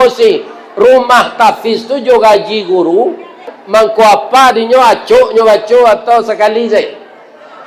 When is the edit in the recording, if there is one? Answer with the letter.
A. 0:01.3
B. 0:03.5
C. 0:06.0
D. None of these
B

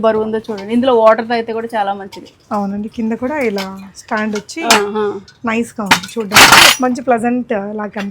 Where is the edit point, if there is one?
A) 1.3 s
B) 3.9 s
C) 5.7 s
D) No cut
D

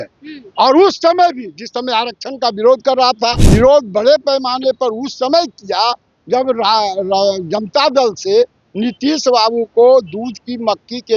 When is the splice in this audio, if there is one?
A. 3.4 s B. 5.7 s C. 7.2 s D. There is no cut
A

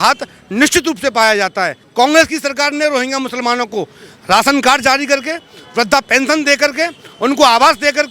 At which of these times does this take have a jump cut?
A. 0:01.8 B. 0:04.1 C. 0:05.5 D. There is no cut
A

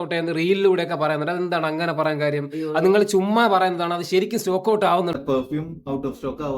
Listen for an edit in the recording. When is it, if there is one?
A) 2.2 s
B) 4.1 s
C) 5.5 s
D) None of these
C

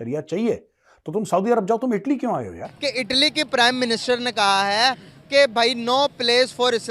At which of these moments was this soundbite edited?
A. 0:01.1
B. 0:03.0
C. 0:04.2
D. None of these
B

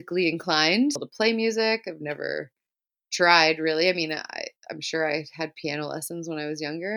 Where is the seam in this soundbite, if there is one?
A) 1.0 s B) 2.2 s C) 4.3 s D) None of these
A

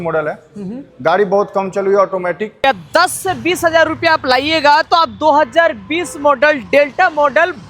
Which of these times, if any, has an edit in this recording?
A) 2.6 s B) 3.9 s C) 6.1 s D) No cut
A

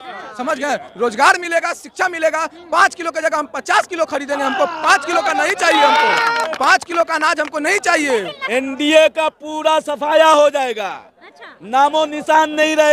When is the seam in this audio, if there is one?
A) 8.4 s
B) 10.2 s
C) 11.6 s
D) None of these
A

